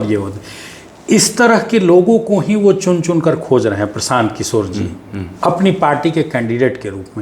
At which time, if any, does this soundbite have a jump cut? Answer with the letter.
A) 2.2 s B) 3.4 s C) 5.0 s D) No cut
D